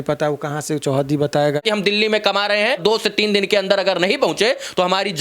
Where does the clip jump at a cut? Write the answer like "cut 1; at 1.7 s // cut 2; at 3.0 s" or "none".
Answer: cut 1; at 1.6 s // cut 2; at 2.8 s